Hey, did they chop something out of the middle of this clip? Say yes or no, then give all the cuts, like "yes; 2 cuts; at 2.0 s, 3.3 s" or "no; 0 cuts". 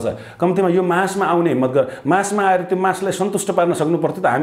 no; 0 cuts